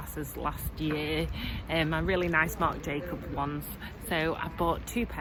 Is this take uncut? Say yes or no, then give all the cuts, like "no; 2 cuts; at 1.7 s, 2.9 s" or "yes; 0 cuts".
yes; 0 cuts